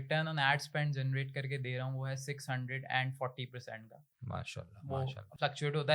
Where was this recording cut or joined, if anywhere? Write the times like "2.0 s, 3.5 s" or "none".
none